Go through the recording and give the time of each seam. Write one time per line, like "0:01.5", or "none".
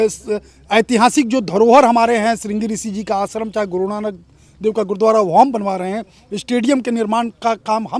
none